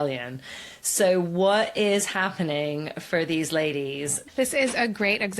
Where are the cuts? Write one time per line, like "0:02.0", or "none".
0:04.2